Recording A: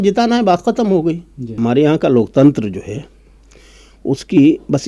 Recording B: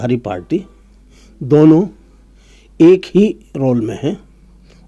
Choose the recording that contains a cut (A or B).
A